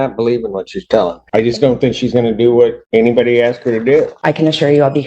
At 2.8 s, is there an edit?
yes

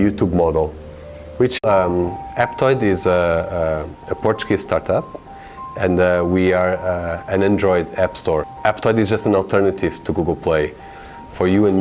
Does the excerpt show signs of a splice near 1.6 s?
no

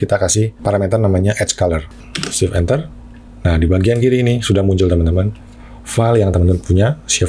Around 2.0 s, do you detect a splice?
yes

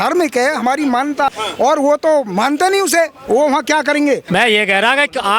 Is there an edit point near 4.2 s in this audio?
yes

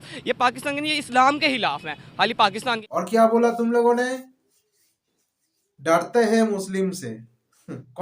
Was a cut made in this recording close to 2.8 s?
yes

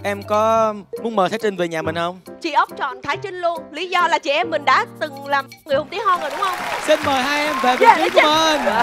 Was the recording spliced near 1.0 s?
no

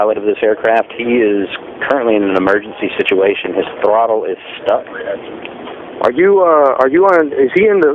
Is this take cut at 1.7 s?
no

